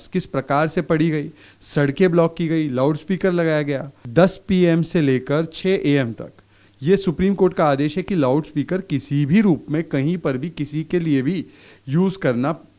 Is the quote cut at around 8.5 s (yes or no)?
no